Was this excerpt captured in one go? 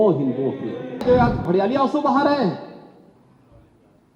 no; 1 cut; at 1.0 s

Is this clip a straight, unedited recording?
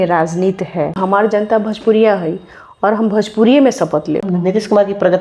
no; 2 cuts; at 1.0 s, 4.3 s

